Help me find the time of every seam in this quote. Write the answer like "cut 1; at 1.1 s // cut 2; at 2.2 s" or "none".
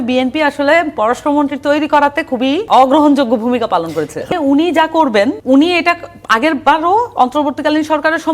cut 1; at 2.7 s // cut 2; at 4.3 s // cut 3; at 5.4 s